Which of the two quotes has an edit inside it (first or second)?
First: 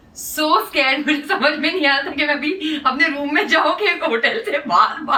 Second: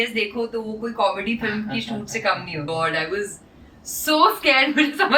second